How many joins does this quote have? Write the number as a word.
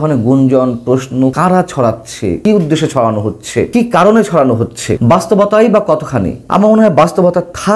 five